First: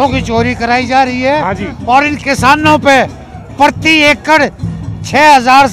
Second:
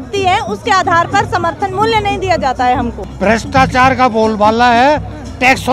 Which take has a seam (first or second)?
second